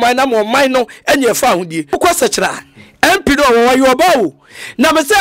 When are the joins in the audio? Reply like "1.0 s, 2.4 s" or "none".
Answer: 1.9 s